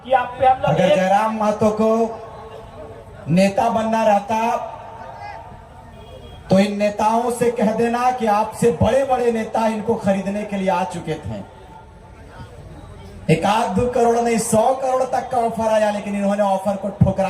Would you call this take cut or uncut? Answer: cut